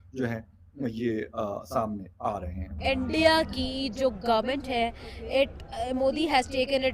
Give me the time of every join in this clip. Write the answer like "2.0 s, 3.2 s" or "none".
2.7 s